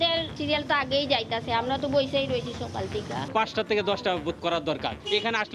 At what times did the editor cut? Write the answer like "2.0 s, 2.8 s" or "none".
3.3 s